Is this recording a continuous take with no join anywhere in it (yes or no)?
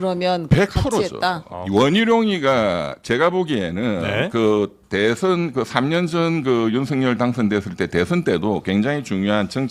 yes